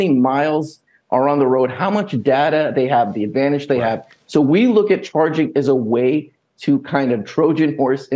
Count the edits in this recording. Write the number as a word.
one